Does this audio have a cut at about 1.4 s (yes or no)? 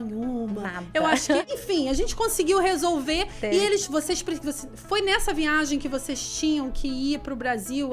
yes